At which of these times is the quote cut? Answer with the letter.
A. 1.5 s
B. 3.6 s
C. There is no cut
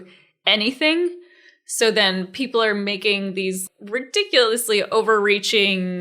B